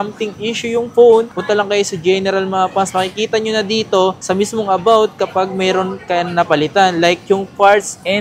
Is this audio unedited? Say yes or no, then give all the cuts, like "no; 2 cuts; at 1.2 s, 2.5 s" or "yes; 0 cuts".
yes; 0 cuts